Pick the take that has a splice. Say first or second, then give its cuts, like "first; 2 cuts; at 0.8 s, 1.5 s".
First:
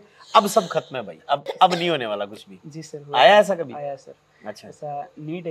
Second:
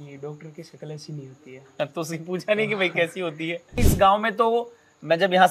second; 1 cut; at 3.8 s